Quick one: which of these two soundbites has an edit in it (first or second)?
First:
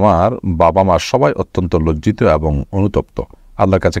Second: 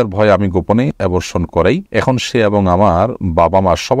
second